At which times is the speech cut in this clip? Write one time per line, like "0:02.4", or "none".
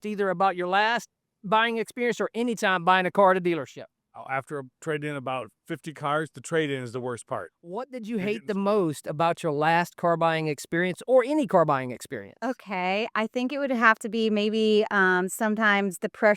0:07.9